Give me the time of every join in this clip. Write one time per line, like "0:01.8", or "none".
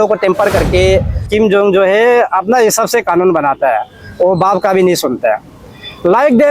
0:01.3